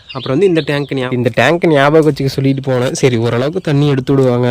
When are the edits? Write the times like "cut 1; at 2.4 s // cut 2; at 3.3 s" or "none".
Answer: cut 1; at 1.1 s